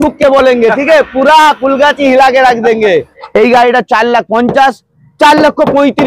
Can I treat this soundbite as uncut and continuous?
no; 1 cut; at 3.2 s

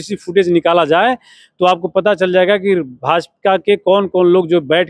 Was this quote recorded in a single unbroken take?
yes; 0 cuts

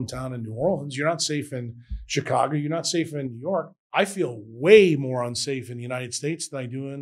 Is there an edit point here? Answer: yes; 1 cut; at 3.7 s

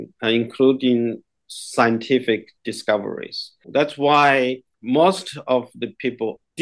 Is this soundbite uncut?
no; 2 cuts; at 3.7 s, 4.7 s

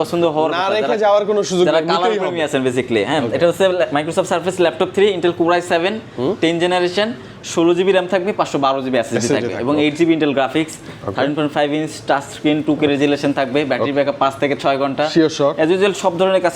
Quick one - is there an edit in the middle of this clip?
no; 0 cuts

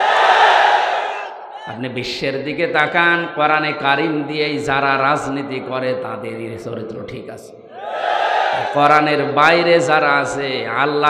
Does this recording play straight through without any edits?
yes; 0 cuts

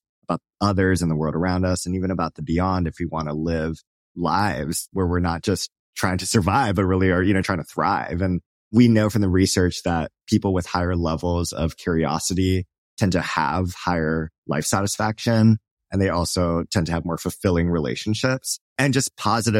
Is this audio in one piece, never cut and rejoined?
no; 4 cuts; at 4.0 s, 4.8 s, 7.5 s, 18.7 s

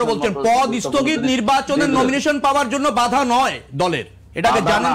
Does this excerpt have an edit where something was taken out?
no; 0 cuts

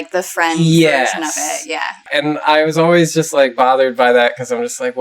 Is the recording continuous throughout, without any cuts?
no; 1 cut; at 2.1 s

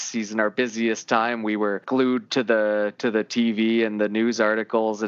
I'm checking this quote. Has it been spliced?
yes; 1 cut; at 1.8 s

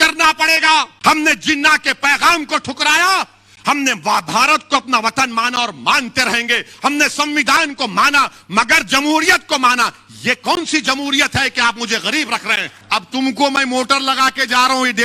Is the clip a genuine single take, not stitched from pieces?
no; 2 cuts; at 0.9 s, 12.7 s

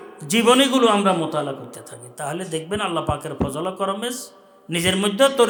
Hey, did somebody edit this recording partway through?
no; 0 cuts

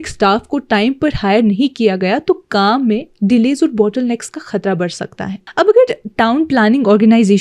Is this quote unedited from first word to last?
yes; 0 cuts

